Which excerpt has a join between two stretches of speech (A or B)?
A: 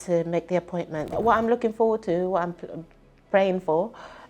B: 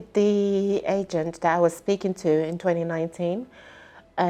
A